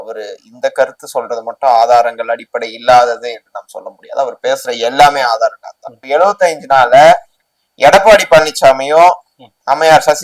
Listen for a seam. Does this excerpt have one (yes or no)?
yes